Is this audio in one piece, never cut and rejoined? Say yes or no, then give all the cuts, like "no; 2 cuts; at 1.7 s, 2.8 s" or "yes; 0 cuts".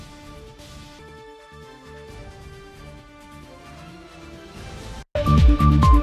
no; 1 cut; at 5.1 s